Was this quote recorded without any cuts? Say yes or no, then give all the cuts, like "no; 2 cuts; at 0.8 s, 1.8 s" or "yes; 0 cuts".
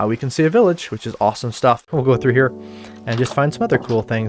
no; 1 cut; at 1.9 s